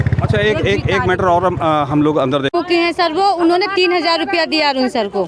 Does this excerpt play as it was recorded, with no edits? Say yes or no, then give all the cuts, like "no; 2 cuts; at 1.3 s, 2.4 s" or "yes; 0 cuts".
no; 1 cut; at 2.5 s